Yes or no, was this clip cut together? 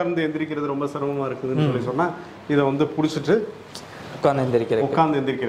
no